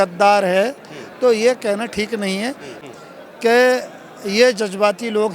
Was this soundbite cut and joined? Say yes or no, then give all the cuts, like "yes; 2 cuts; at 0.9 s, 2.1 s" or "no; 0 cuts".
yes; 1 cut; at 2.7 s